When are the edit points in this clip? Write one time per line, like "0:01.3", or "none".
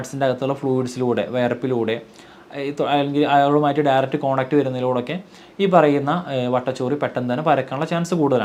none

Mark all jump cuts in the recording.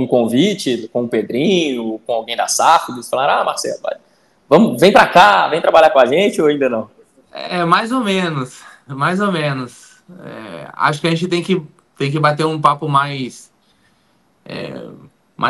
none

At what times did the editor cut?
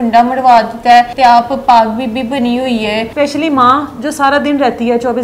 0:01.1
0:03.1

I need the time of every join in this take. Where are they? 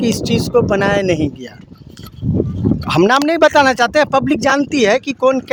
none

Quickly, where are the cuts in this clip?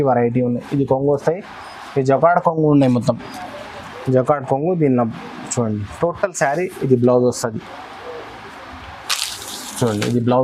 none

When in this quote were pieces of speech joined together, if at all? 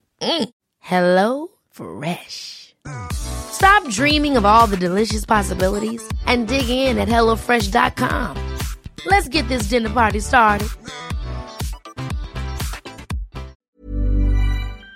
0:13.6

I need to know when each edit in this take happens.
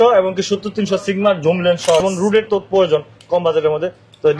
0:02.0

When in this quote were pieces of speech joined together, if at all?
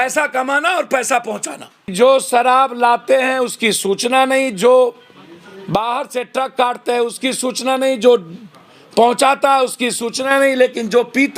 0:01.9

